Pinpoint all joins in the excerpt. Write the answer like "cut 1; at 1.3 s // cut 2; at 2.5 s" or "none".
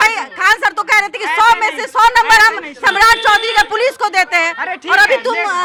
none